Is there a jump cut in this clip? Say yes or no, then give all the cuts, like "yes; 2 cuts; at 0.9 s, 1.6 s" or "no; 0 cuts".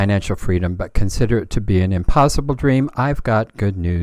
no; 0 cuts